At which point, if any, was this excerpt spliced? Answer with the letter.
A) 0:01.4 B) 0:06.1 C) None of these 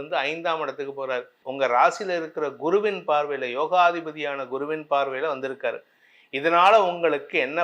A